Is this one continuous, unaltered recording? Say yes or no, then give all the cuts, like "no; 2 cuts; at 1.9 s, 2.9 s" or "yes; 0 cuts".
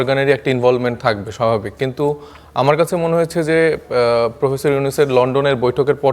yes; 0 cuts